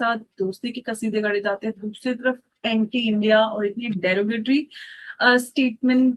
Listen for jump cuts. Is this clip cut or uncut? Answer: uncut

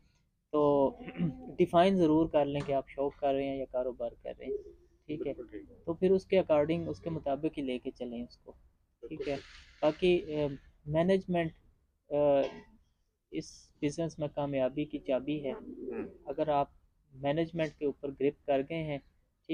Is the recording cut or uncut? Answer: uncut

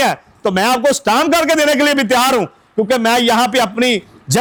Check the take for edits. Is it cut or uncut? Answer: uncut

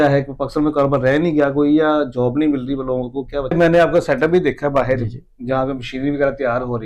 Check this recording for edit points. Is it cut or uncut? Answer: cut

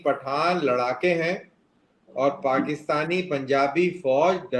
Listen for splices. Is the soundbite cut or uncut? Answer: uncut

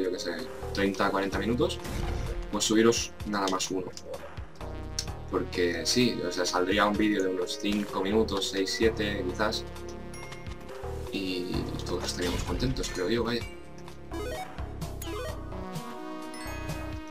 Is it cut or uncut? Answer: uncut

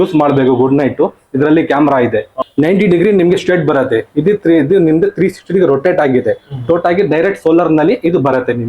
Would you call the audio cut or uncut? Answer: cut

